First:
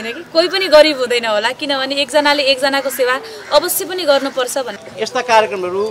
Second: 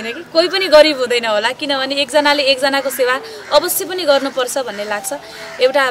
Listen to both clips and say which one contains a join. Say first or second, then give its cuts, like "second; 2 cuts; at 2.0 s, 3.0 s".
first; 1 cut; at 4.8 s